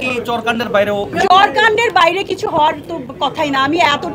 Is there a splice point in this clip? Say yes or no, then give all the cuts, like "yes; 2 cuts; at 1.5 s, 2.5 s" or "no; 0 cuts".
yes; 1 cut; at 1.1 s